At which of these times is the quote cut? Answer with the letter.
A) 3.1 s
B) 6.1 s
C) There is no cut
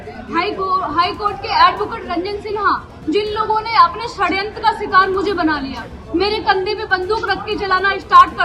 C